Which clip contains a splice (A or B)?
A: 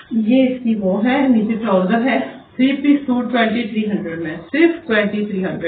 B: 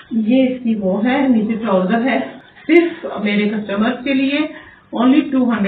B